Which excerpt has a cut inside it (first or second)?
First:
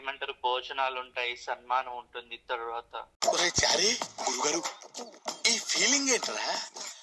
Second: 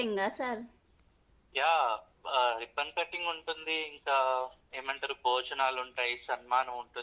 first